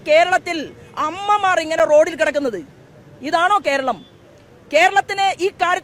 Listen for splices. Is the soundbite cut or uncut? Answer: uncut